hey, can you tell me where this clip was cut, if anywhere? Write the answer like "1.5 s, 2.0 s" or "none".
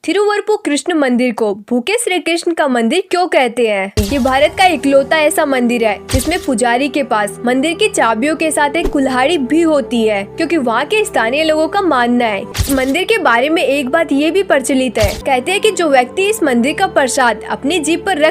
4.0 s, 12.5 s, 15.2 s